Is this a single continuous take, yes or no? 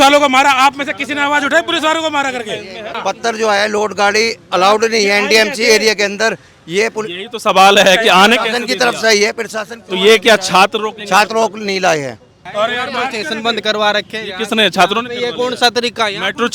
no